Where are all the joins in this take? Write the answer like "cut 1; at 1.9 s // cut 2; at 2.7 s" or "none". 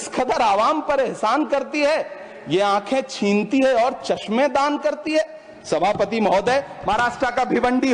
none